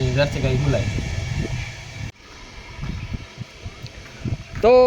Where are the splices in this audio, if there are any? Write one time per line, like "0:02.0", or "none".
0:02.1